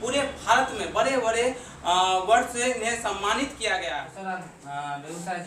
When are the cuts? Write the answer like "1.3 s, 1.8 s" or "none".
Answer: 4.1 s